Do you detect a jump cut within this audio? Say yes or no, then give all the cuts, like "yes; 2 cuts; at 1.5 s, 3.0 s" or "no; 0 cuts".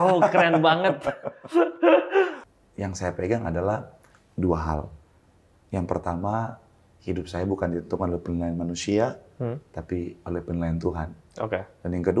yes; 1 cut; at 2.4 s